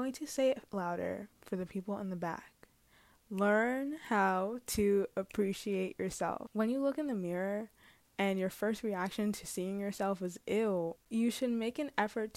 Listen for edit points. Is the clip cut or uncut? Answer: cut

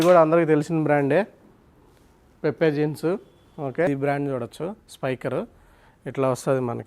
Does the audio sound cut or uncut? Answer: cut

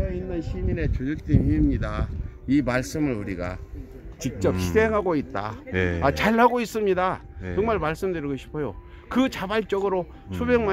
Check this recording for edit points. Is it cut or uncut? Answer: uncut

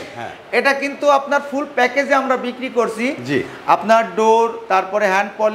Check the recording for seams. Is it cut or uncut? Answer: uncut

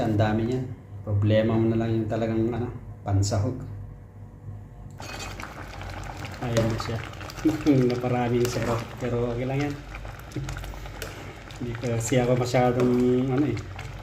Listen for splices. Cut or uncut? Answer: cut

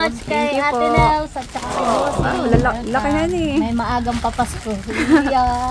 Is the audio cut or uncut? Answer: uncut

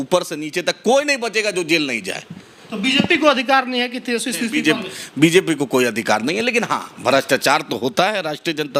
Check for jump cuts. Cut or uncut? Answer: uncut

